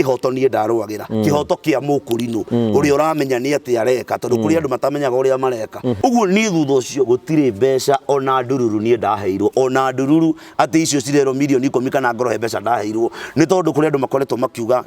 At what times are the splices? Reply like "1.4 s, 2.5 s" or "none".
6.0 s